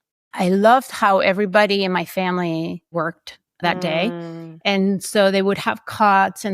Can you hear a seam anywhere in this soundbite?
yes; 1 cut; at 2.9 s

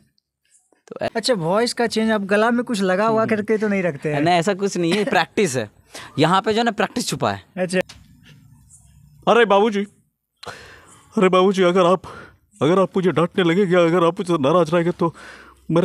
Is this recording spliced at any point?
yes; 2 cuts; at 1.1 s, 7.8 s

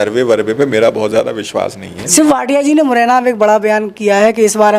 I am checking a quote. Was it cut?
yes; 1 cut; at 2.1 s

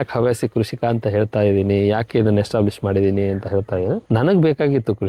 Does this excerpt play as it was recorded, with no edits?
no; 1 cut; at 4.0 s

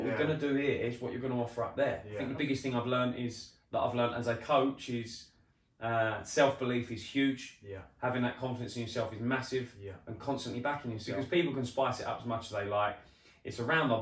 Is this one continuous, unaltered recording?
no; 2 cuts; at 2.1 s, 11.0 s

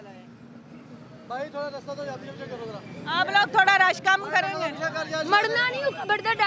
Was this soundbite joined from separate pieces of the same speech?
no; 0 cuts

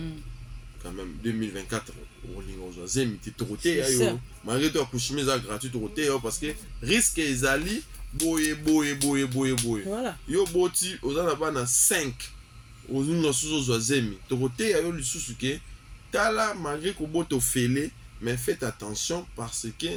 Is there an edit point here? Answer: no; 0 cuts

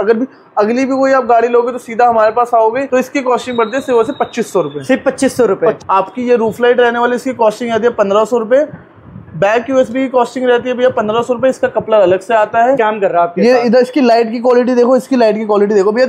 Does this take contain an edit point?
yes; 3 cuts; at 2.8 s, 5.8 s, 12.8 s

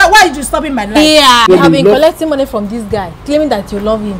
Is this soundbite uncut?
no; 1 cut; at 1.4 s

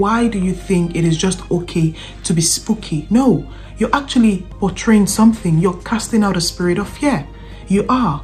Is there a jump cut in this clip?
no; 0 cuts

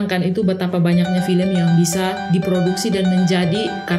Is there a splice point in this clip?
no; 0 cuts

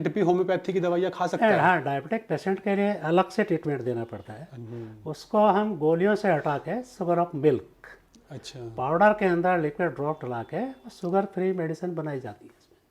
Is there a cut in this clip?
no; 0 cuts

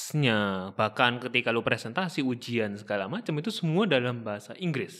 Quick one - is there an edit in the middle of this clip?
no; 0 cuts

